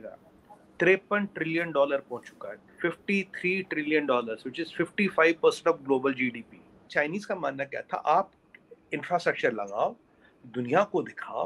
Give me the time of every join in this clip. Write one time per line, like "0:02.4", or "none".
0:06.9